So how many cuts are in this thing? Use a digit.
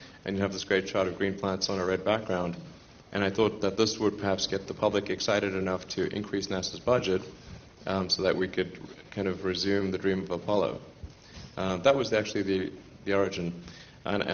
1